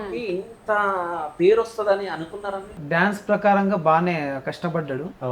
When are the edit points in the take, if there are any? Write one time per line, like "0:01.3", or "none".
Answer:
0:02.7